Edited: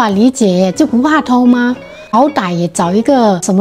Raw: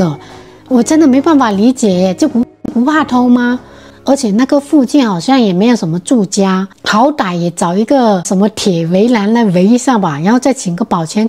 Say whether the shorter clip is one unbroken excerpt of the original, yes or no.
no